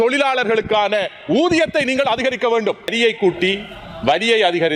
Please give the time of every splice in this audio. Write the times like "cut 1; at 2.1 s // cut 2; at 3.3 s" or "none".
cut 1; at 2.9 s